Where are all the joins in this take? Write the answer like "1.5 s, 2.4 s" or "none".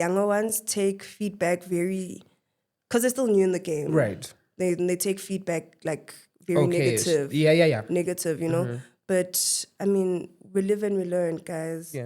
none